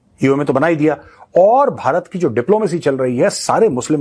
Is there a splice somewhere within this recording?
no; 0 cuts

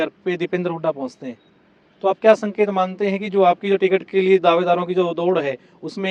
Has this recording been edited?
no; 0 cuts

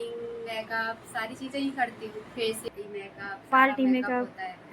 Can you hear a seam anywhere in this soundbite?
yes; 1 cut; at 2.7 s

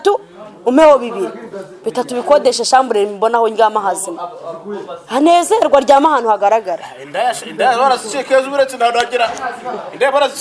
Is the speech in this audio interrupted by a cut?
no; 0 cuts

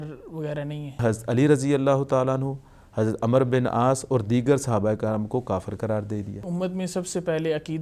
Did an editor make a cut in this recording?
yes; 2 cuts; at 1.0 s, 6.5 s

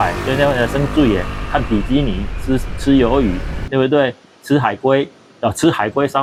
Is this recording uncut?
yes; 0 cuts

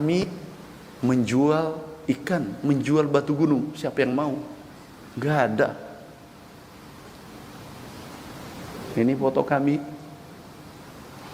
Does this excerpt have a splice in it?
no; 0 cuts

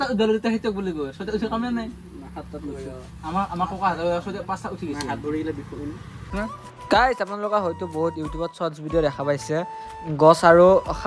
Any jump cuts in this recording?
yes; 1 cut; at 6.2 s

